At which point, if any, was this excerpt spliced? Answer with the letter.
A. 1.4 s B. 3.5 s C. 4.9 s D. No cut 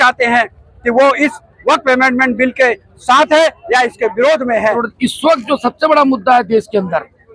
C